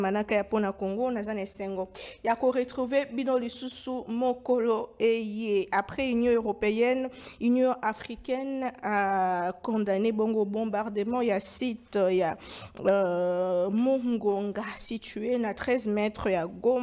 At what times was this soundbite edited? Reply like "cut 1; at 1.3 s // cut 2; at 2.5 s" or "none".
none